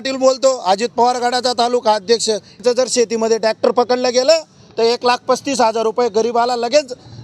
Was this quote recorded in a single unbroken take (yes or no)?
no